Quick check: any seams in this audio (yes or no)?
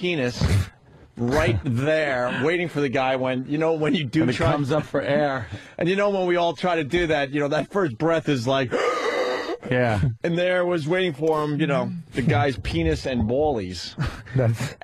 yes